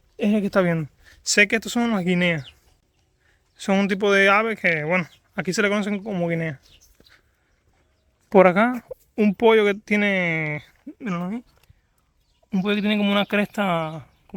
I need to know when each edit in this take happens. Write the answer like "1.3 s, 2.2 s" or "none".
none